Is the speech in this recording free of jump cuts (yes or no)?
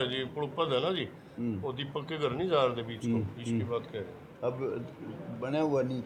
yes